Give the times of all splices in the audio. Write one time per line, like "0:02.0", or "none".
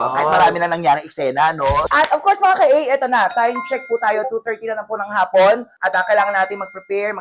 0:01.8
0:05.7